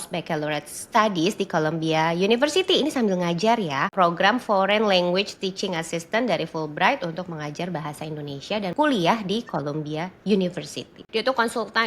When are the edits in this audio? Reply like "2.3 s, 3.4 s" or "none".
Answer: 3.9 s, 8.7 s, 11.0 s